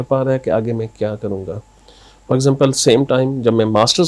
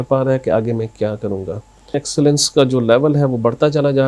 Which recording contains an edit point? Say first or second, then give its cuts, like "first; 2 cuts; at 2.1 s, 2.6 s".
second; 1 cut; at 2.1 s